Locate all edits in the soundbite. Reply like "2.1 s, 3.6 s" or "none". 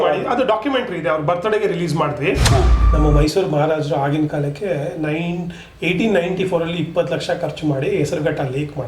2.8 s